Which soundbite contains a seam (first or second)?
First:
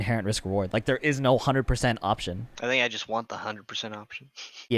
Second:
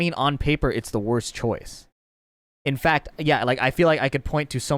first